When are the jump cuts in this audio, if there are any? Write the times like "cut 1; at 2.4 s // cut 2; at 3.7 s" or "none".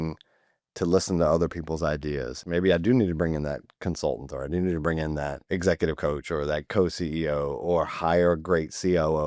cut 1; at 2.4 s // cut 2; at 5.4 s